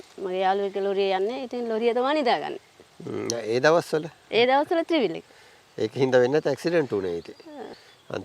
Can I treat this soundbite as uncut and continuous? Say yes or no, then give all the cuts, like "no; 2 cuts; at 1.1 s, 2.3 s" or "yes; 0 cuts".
yes; 0 cuts